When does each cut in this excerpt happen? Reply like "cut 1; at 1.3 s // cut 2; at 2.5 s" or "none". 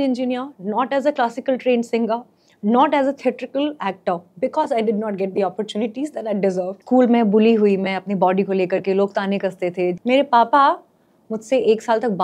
cut 1; at 6.8 s // cut 2; at 10.0 s